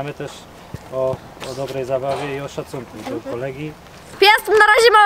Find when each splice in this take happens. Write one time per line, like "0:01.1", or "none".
0:04.0